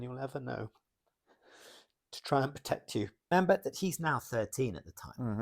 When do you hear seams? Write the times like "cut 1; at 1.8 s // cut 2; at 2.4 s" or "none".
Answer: cut 1; at 3.3 s